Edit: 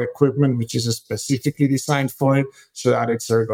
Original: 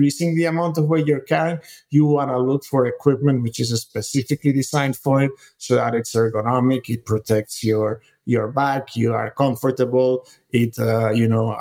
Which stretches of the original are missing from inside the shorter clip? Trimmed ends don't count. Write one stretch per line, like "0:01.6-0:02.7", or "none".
none